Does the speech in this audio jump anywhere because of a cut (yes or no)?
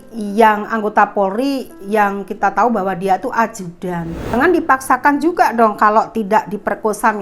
yes